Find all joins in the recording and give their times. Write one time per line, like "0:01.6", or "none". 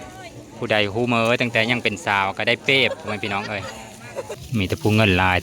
0:04.4